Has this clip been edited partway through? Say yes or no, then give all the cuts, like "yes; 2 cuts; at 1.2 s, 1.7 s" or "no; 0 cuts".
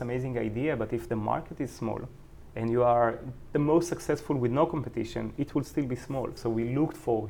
yes; 1 cut; at 6.3 s